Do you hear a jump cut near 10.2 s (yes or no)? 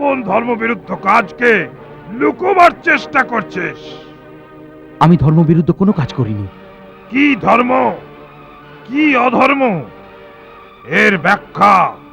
no